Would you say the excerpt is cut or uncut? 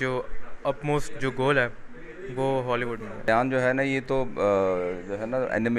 cut